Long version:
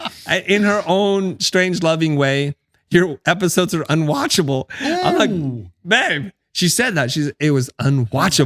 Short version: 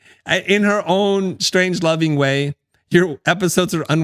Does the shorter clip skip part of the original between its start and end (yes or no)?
no